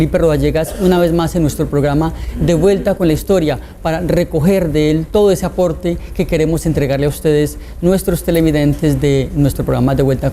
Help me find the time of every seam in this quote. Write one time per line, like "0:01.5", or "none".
0:09.3